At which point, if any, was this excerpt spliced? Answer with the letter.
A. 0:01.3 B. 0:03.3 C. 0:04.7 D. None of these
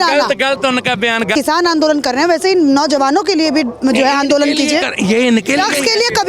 A